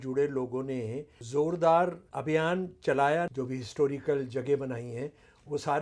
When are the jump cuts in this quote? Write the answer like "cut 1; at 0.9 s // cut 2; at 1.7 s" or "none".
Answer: cut 1; at 1.2 s // cut 2; at 2.1 s // cut 3; at 3.3 s